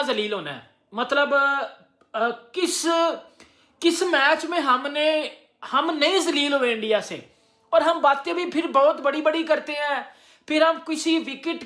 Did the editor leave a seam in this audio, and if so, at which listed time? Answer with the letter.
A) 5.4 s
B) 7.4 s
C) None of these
C